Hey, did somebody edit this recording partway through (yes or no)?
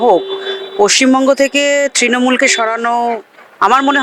no